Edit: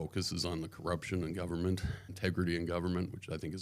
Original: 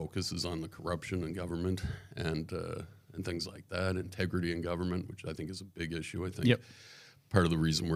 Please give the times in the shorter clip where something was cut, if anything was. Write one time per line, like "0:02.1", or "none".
0:02.1